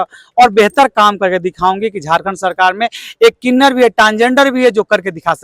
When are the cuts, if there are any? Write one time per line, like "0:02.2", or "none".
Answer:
none